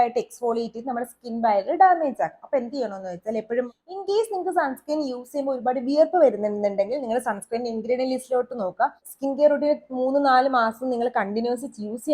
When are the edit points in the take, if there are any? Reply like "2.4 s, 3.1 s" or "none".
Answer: 3.7 s, 9.1 s